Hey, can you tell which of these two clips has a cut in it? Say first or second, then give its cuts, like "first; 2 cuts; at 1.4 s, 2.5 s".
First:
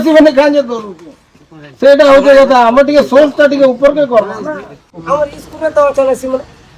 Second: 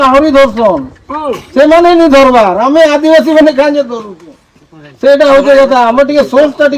first; 1 cut; at 4.9 s